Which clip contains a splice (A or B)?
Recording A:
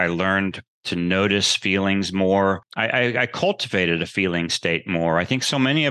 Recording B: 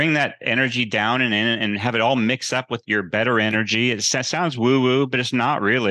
A